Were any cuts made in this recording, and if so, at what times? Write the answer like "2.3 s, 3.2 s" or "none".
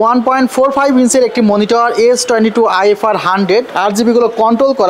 3.7 s